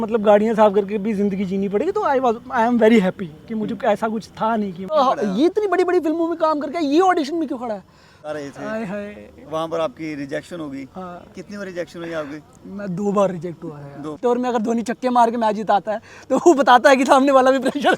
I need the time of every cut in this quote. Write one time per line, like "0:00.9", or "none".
0:04.9
0:08.3
0:14.4